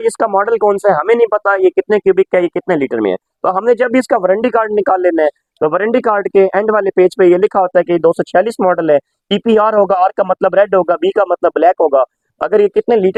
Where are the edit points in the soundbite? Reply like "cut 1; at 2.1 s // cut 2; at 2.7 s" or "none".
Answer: none